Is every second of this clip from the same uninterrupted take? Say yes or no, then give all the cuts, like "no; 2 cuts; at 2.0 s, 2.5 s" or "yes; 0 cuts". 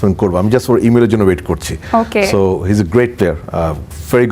yes; 0 cuts